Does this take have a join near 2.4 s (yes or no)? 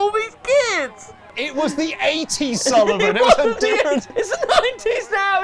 no